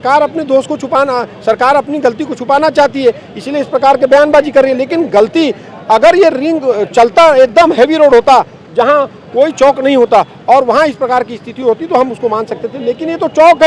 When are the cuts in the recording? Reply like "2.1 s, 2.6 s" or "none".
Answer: none